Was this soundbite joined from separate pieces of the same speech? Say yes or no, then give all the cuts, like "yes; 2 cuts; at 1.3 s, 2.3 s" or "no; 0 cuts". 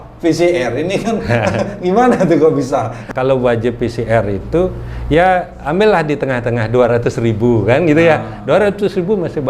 yes; 1 cut; at 3.0 s